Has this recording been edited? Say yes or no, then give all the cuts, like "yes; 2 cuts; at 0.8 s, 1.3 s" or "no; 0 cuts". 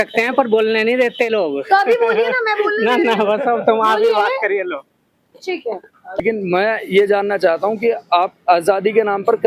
yes; 1 cut; at 6.2 s